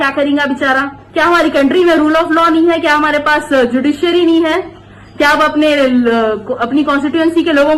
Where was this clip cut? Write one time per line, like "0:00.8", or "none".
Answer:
0:01.0